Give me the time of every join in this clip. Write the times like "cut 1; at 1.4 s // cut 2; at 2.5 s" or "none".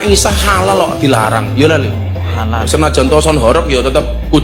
none